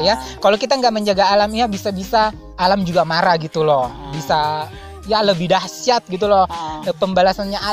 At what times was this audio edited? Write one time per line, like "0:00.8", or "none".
0:02.4